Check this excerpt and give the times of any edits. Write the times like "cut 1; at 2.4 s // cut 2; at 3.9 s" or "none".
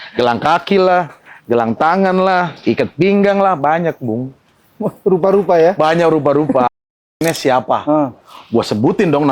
cut 1; at 7.2 s